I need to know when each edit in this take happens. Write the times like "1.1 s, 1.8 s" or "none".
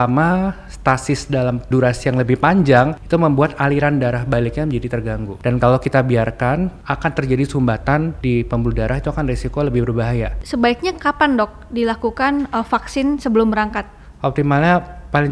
1.7 s, 3.0 s, 5.3 s, 6.8 s, 8.2 s, 10.4 s